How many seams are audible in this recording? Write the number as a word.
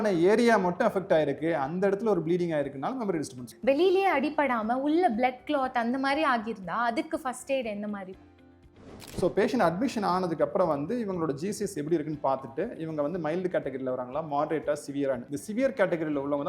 two